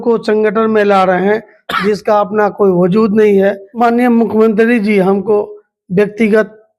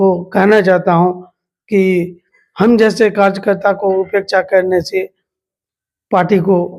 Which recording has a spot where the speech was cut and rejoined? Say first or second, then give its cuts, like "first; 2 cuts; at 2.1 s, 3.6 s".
first; 1 cut; at 3.7 s